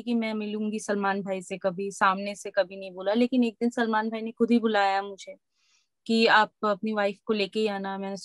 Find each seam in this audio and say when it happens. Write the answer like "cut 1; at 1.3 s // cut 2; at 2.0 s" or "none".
none